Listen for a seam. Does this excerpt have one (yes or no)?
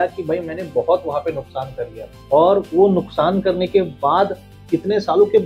no